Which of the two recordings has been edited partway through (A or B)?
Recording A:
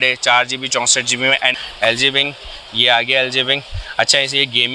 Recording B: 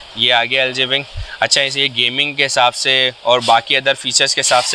A